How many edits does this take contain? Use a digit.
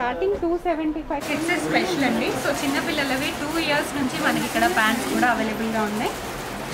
1